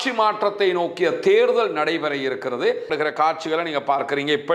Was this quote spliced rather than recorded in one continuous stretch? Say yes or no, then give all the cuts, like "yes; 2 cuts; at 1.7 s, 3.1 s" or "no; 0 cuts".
yes; 1 cut; at 2.9 s